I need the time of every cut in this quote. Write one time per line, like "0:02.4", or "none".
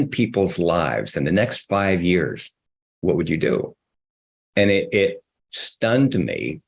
none